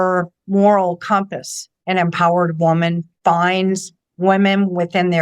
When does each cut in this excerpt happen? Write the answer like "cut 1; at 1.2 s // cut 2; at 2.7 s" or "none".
cut 1; at 1.7 s // cut 2; at 3.1 s